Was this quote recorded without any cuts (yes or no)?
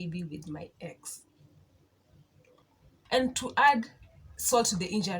no